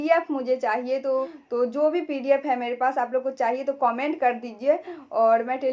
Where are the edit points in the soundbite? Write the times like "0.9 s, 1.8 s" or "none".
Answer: 1.4 s

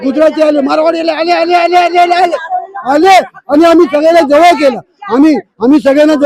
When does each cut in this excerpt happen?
none

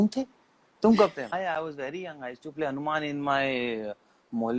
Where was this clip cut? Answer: 1.3 s

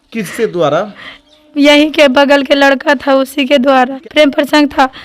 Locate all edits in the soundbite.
4.0 s

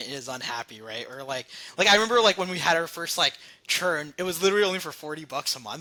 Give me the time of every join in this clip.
none

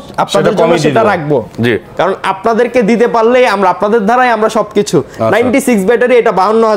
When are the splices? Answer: none

